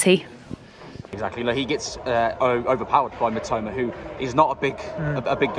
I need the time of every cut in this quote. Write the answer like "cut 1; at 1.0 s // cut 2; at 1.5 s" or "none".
cut 1; at 1.1 s